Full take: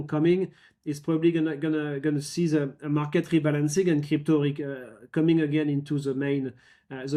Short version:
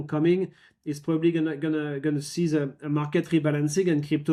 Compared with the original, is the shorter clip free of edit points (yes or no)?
yes